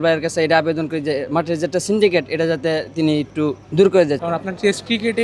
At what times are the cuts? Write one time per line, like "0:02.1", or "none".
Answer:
0:03.6
0:04.2